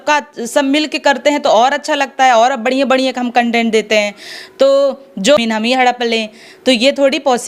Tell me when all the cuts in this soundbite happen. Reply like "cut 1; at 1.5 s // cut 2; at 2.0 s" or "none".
cut 1; at 5.4 s